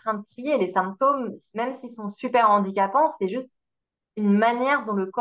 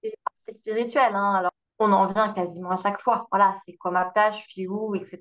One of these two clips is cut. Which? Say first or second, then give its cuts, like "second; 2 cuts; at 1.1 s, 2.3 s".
second; 1 cut; at 1.5 s